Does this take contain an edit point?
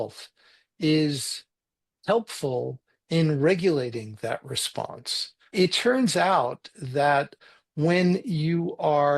yes; 2 cuts; at 5.5 s, 7.4 s

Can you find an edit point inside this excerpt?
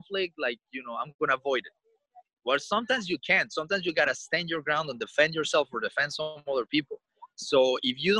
no; 0 cuts

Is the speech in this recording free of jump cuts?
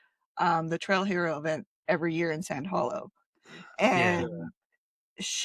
yes; 0 cuts

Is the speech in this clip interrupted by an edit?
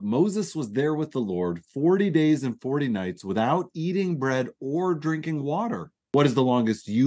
yes; 1 cut; at 6.1 s

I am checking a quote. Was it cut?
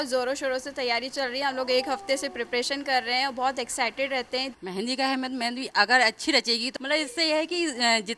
yes; 1 cut; at 4.5 s

